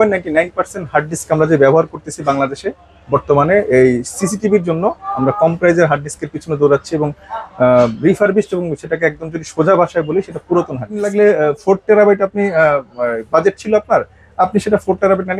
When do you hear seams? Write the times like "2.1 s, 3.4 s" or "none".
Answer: 11.1 s